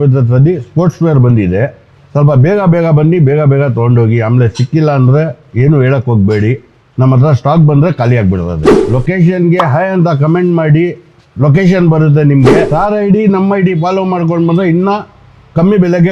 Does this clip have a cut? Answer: no; 0 cuts

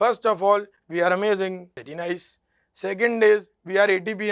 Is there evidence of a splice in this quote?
yes; 1 cut; at 1.8 s

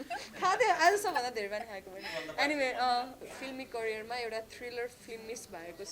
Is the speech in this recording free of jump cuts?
no; 1 cut; at 3.2 s

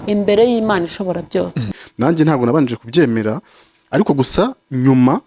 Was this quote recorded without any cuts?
no; 1 cut; at 1.7 s

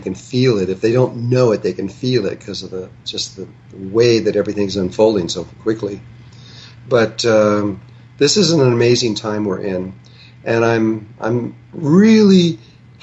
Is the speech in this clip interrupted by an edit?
no; 0 cuts

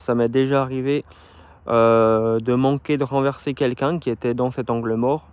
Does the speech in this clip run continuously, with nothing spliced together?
yes; 0 cuts

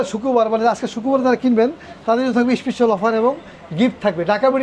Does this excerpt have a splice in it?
no; 0 cuts

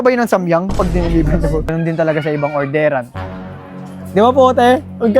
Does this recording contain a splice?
yes; 1 cut; at 1.7 s

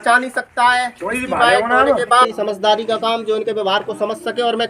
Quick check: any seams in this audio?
yes; 1 cut; at 2.2 s

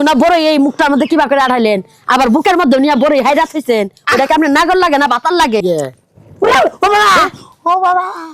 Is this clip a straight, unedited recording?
no; 1 cut; at 5.6 s

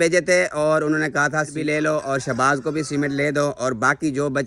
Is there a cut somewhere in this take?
yes; 1 cut; at 1.5 s

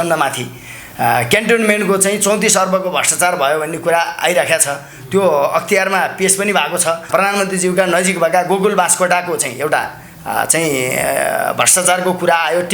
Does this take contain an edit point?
yes; 1 cut; at 7.1 s

